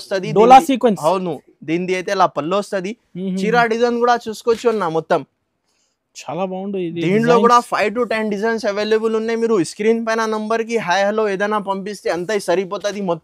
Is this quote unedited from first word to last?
yes; 0 cuts

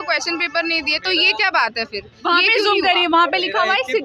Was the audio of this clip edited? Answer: no; 0 cuts

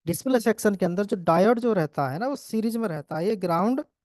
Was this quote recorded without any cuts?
yes; 0 cuts

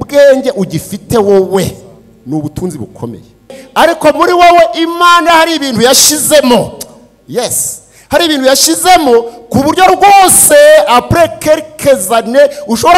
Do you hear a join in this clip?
yes; 1 cut; at 3.6 s

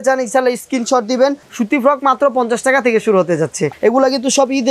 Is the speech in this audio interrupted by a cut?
yes; 2 cuts; at 1.5 s, 3.6 s

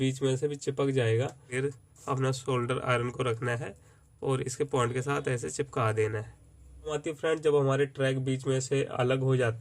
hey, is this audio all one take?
no; 2 cuts; at 1.6 s, 7.0 s

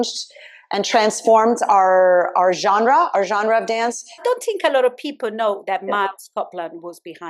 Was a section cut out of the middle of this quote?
yes; 1 cut; at 4.1 s

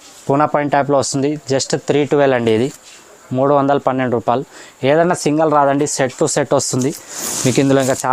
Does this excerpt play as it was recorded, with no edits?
yes; 0 cuts

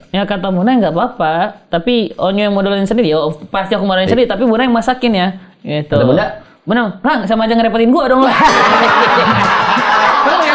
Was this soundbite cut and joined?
no; 0 cuts

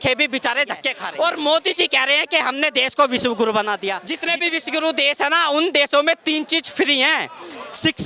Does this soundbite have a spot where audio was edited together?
yes; 2 cuts; at 1.0 s, 4.1 s

